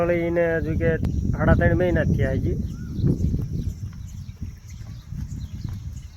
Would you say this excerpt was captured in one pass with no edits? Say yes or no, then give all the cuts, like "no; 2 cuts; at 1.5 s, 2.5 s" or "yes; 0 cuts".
no; 1 cut; at 1.0 s